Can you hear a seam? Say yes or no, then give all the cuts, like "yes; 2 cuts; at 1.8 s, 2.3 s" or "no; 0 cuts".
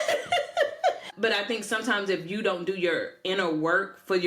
yes; 1 cut; at 1.0 s